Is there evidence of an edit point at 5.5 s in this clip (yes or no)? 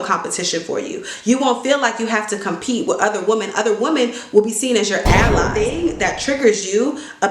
yes